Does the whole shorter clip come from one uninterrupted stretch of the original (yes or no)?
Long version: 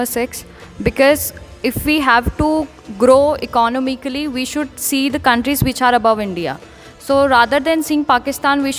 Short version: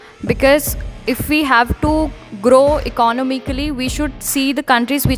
yes